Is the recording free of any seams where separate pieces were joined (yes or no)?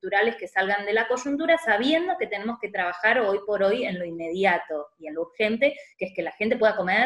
yes